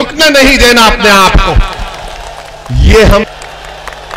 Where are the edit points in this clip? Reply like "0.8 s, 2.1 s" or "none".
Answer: 3.3 s